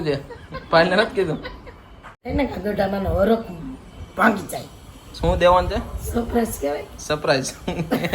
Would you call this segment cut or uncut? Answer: cut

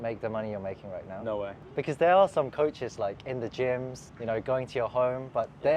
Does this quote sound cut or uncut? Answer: uncut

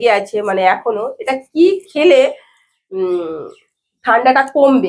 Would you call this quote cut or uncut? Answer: uncut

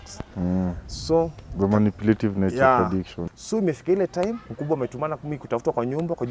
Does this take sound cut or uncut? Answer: cut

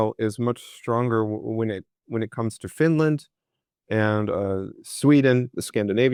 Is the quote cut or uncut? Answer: uncut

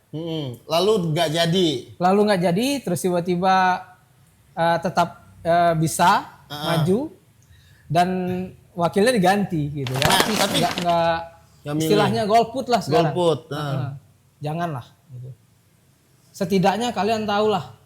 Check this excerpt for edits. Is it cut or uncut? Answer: cut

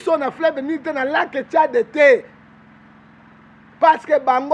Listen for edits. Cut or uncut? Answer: uncut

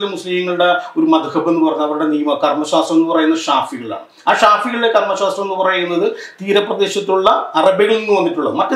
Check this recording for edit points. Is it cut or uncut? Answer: uncut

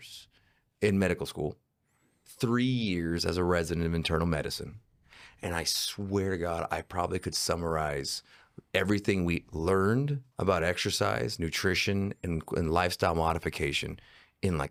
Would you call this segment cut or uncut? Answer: uncut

